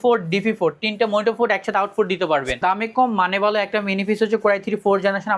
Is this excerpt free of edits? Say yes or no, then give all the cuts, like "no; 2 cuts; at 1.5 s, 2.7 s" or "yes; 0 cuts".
no; 1 cut; at 2.5 s